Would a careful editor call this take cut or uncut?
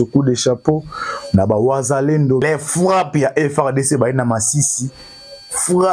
cut